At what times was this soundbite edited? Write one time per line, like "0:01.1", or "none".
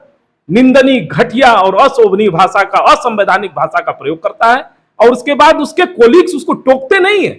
none